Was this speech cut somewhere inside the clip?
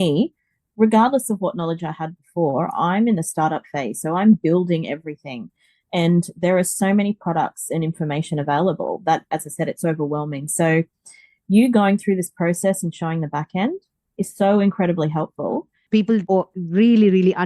yes; 1 cut; at 16.1 s

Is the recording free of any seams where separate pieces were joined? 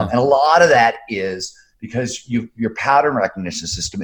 yes; 0 cuts

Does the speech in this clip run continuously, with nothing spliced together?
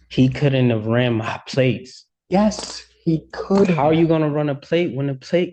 yes; 0 cuts

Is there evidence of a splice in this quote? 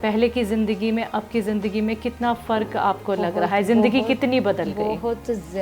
no; 0 cuts

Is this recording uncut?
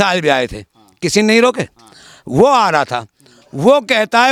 yes; 0 cuts

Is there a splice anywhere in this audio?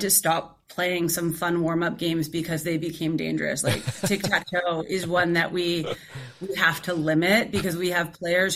no; 0 cuts

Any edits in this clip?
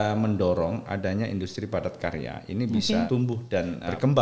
yes; 1 cut; at 3.3 s

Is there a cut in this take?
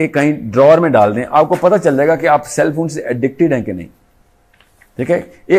no; 0 cuts

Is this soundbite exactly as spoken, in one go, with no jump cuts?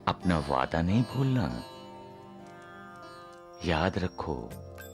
yes; 0 cuts

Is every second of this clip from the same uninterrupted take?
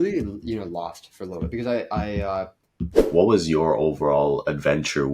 no; 1 cut; at 3.0 s

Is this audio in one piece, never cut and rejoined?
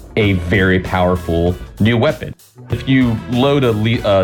no; 1 cut; at 2.6 s

